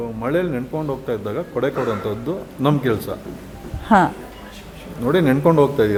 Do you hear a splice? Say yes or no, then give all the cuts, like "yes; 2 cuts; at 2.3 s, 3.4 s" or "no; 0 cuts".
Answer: no; 0 cuts